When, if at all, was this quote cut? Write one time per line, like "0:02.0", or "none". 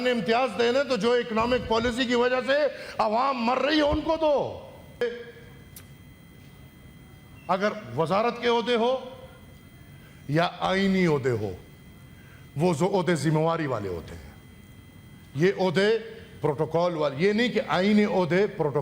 0:05.0